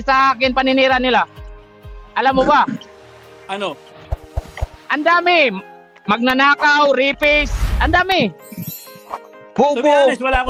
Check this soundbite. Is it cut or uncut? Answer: uncut